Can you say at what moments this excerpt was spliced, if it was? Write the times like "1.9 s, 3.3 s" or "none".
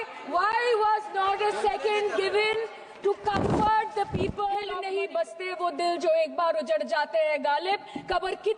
4.8 s